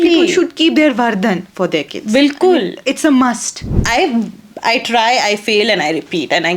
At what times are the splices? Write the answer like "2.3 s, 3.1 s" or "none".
3.7 s